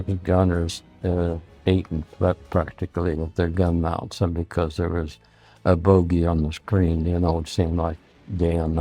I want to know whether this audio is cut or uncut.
uncut